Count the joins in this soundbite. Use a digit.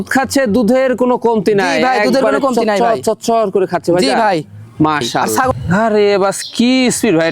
1